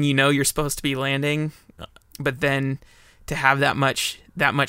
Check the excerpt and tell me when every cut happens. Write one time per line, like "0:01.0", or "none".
0:01.9